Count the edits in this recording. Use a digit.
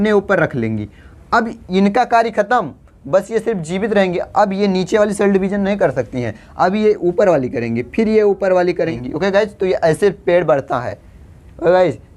1